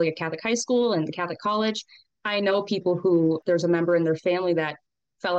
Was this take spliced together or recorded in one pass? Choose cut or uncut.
cut